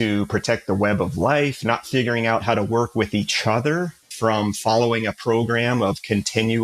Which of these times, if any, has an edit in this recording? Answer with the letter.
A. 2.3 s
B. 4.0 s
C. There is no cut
B